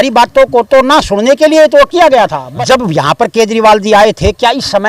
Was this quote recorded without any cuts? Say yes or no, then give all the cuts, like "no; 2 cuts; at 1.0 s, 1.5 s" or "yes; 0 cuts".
no; 1 cut; at 2.4 s